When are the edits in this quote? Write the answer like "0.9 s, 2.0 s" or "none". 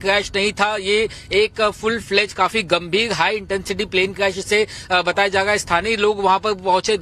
5.9 s